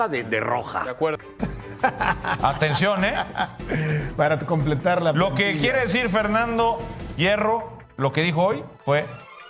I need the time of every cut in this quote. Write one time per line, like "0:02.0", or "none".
0:01.2